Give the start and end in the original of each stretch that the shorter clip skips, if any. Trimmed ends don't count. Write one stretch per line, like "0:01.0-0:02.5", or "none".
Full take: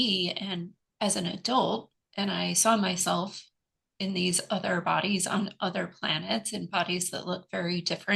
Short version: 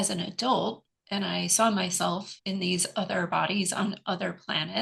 0:03.4-0:03.9